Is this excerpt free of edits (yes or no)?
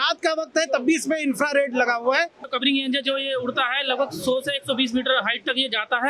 no